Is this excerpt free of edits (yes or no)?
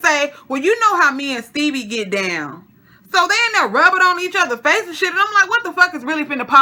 yes